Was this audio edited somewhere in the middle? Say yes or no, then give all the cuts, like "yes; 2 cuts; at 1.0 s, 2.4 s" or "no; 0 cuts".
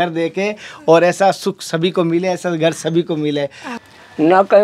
yes; 1 cut; at 3.7 s